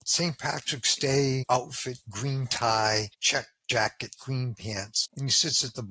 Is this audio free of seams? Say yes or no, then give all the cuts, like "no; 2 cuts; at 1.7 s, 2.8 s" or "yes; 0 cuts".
no; 3 cuts; at 1.4 s, 3.2 s, 5.0 s